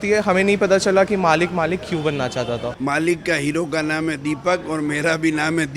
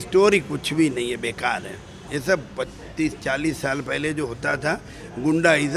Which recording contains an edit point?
first; 1 cut; at 2.7 s

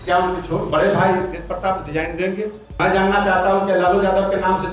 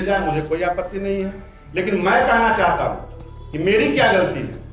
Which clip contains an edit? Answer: first; 1 cut; at 2.6 s

